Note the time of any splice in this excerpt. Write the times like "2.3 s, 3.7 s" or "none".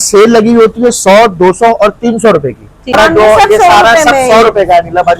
2.9 s